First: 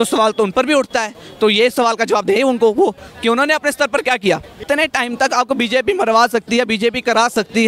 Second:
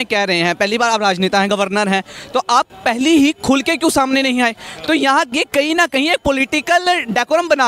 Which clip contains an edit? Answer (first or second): first